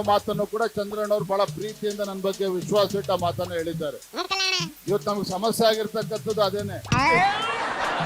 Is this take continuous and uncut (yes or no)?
no